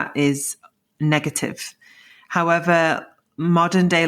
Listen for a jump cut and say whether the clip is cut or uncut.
uncut